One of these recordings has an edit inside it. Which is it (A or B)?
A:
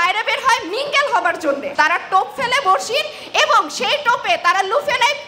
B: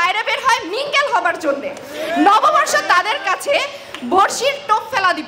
A